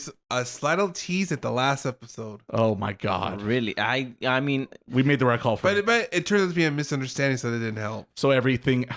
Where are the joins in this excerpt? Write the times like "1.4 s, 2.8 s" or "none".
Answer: none